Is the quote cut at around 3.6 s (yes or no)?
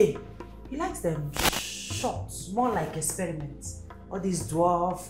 no